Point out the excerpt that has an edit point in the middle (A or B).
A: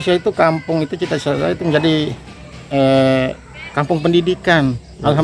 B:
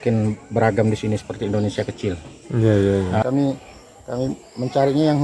B